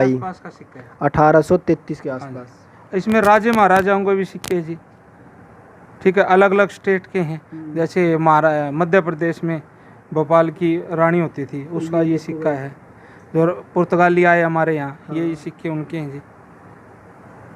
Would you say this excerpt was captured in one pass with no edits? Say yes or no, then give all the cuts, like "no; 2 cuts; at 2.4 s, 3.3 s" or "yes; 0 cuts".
yes; 0 cuts